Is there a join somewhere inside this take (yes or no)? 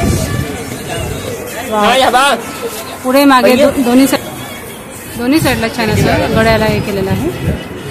no